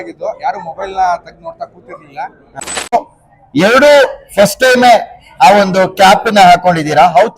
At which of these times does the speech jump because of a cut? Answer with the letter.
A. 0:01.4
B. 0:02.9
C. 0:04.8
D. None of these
B